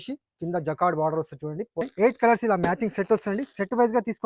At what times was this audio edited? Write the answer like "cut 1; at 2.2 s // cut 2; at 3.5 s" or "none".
cut 1; at 1.9 s